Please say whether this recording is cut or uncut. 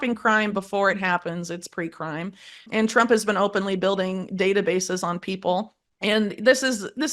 cut